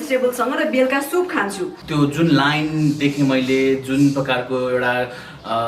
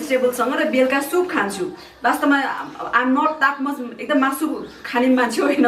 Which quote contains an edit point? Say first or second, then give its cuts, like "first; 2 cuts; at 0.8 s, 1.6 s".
first; 1 cut; at 1.8 s